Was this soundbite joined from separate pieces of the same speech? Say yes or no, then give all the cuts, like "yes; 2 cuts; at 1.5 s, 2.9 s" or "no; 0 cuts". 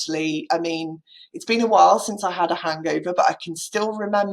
no; 0 cuts